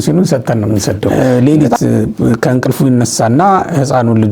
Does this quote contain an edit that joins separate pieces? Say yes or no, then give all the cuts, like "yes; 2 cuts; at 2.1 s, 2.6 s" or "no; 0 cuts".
yes; 1 cut; at 1.1 s